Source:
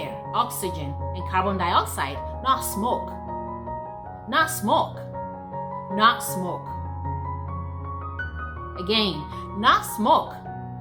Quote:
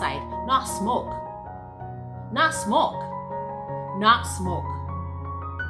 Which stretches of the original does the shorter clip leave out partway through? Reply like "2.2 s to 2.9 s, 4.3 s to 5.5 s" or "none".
6.6 s to 7.2 s